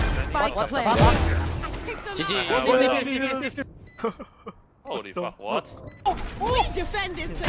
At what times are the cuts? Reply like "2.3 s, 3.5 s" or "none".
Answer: 6.1 s

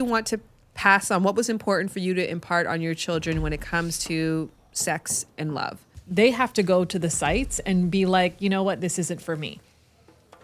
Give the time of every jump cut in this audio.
6.0 s

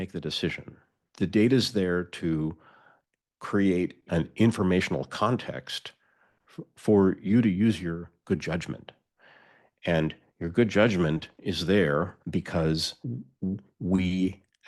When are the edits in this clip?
1.0 s

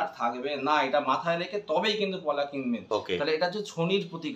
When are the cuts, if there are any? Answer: 2.8 s

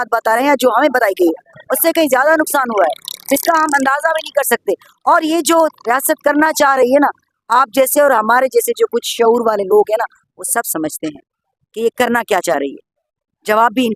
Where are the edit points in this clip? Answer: none

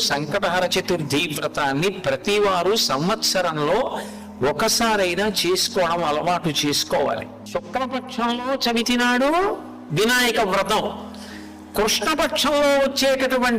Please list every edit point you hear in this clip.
7.8 s

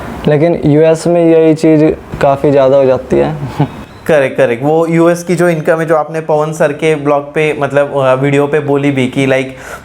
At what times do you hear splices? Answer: none

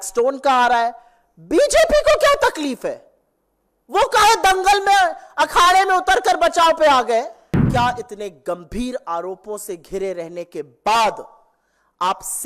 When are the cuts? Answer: 7.6 s

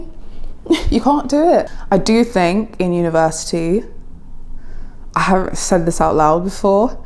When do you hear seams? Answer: 1.8 s

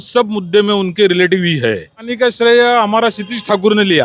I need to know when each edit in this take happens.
2.0 s

